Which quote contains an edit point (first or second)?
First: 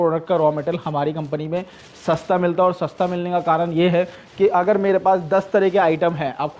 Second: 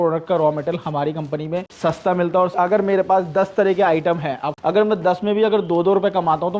second